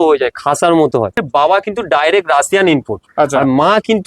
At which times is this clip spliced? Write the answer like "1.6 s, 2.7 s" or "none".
1.1 s